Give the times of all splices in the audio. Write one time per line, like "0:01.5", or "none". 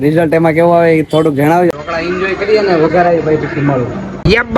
0:01.7